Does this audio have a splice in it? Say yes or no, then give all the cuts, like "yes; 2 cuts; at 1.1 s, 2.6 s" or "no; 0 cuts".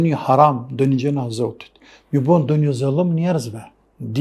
no; 0 cuts